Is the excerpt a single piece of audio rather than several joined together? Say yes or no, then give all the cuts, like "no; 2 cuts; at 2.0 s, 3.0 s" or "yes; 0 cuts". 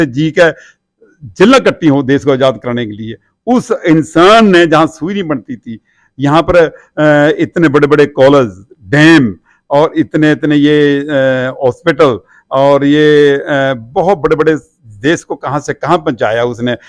yes; 0 cuts